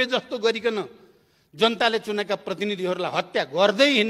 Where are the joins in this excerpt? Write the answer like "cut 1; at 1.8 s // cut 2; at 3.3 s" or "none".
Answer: none